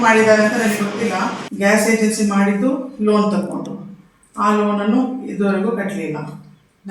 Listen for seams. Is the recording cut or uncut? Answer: cut